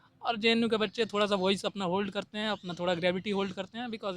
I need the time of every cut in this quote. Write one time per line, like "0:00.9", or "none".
none